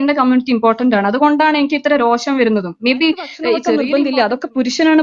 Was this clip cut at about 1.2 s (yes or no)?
no